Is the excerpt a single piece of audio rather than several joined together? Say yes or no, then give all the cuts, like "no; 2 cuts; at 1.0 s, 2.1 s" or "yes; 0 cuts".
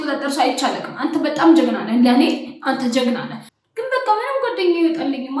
no; 1 cut; at 3.4 s